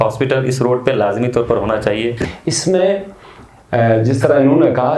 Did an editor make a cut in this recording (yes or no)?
yes